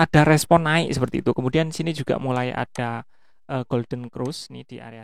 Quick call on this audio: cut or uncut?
uncut